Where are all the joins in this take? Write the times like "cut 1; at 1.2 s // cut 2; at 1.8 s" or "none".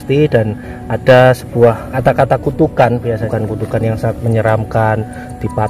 cut 1; at 1.9 s // cut 2; at 3.2 s